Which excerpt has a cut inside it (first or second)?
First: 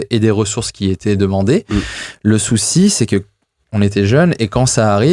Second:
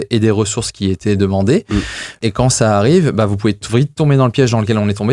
second